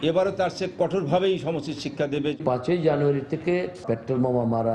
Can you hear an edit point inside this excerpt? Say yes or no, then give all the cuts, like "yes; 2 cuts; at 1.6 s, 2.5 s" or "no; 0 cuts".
yes; 2 cuts; at 2.4 s, 3.7 s